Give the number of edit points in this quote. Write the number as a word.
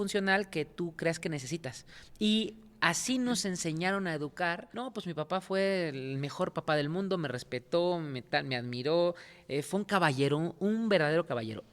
one